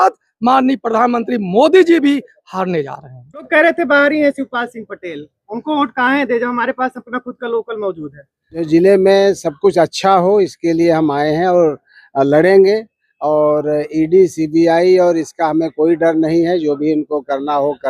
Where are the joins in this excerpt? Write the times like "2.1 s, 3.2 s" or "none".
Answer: 3.5 s, 8.7 s